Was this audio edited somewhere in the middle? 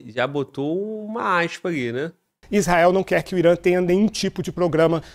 yes; 1 cut; at 2.4 s

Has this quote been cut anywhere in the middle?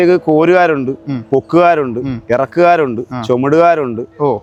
no; 0 cuts

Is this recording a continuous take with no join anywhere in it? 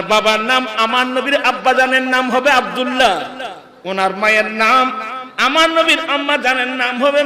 yes; 0 cuts

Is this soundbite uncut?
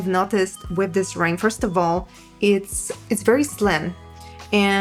yes; 0 cuts

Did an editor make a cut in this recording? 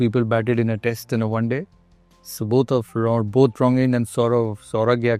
no; 0 cuts

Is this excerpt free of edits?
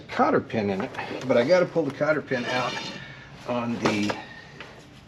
yes; 0 cuts

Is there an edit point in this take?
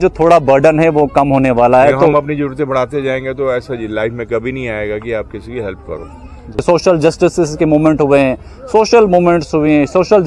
yes; 2 cuts; at 2.1 s, 6.6 s

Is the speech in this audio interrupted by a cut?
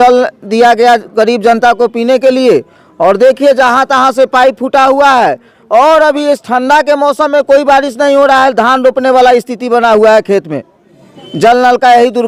no; 0 cuts

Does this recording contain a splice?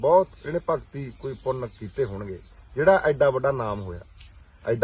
no; 0 cuts

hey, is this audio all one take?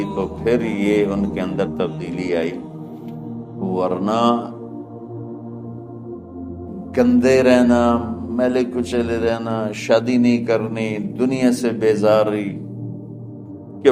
yes; 0 cuts

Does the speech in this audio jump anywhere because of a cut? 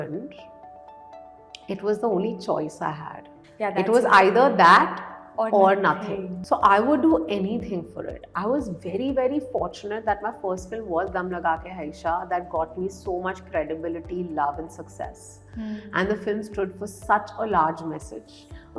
no; 0 cuts

